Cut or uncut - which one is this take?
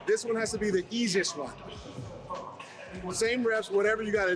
uncut